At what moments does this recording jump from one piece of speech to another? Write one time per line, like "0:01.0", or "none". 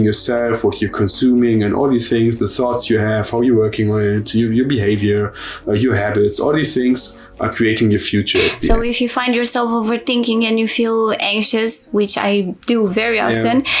0:08.7